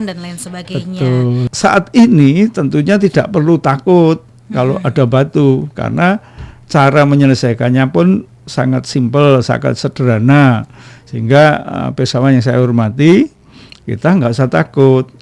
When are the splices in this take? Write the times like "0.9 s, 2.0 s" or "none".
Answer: 1.5 s